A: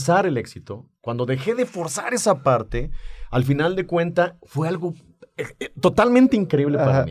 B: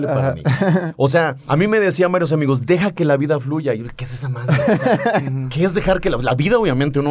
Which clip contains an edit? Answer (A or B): B